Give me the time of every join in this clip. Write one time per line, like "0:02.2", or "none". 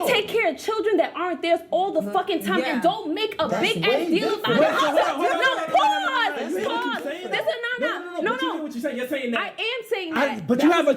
none